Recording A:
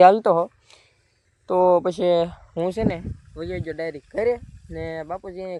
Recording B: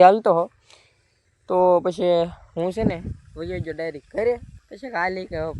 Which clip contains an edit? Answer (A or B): B